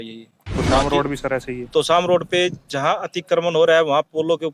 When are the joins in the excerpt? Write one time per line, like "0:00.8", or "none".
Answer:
none